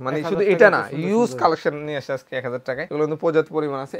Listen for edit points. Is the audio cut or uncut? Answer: cut